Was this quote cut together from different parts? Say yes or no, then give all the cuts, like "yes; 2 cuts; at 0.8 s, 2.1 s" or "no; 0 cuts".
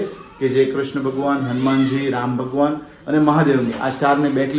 no; 0 cuts